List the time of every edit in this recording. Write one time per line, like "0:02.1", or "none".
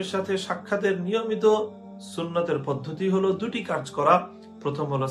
none